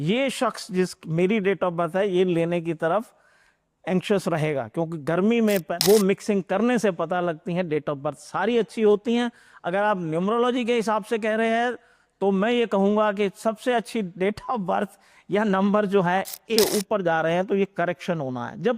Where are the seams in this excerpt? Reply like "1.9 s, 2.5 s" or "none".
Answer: 5.7 s, 16.5 s